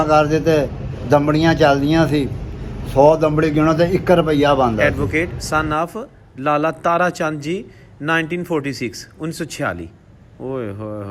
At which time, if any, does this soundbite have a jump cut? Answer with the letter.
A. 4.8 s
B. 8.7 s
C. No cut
A